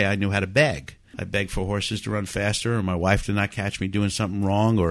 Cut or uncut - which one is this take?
cut